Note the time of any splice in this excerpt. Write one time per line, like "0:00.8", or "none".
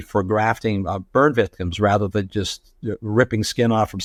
none

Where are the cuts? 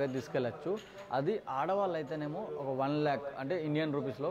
none

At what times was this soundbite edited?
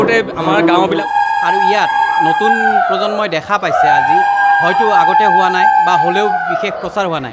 0:01.0

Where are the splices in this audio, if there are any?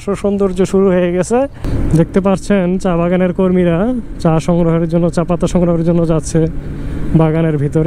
none

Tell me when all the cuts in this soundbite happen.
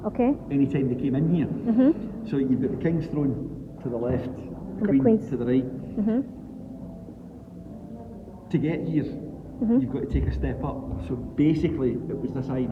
none

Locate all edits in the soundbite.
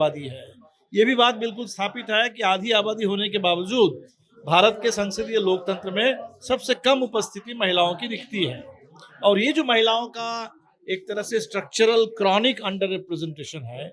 none

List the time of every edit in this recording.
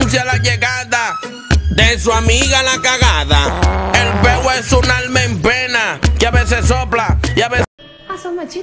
0:07.7

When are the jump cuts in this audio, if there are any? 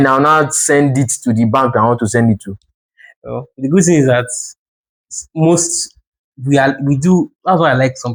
none

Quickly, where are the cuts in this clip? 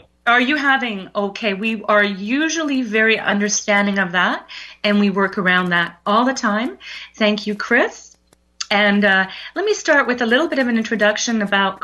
0:04.1

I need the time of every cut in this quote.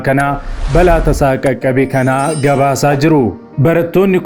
none

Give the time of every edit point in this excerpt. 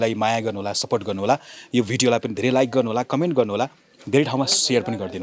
none

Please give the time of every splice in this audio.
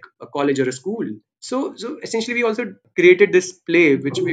0:01.3
0:02.8

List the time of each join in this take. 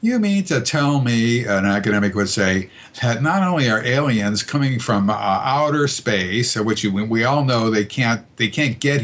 none

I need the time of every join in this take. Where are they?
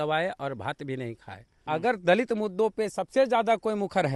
0:01.6

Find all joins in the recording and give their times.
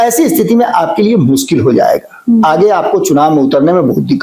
none

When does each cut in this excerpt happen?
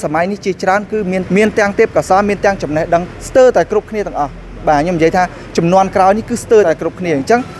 0:01.2
0:03.2
0:06.7

